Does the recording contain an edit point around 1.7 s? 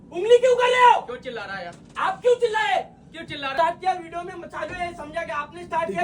no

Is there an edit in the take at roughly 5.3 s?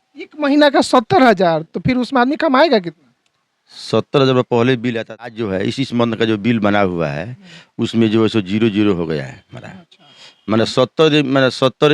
yes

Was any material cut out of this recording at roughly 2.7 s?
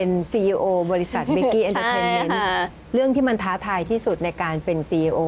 yes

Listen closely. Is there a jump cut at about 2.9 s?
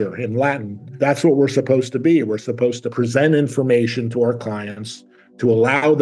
yes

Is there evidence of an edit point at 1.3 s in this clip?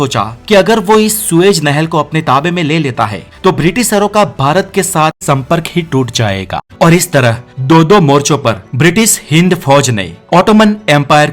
no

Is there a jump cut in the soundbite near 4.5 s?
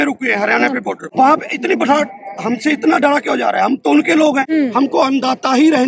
yes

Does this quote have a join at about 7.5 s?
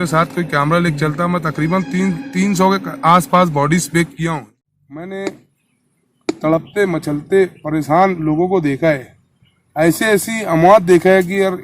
no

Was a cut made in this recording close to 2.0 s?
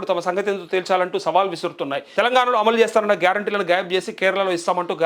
yes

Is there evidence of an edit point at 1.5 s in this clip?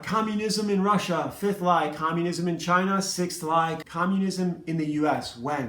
no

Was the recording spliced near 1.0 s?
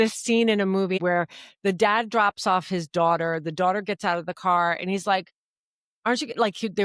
yes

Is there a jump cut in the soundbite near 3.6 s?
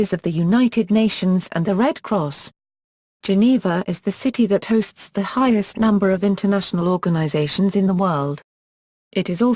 yes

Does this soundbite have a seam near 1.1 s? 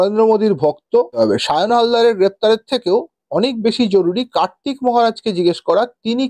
yes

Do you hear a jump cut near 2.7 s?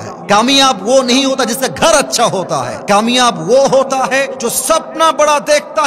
yes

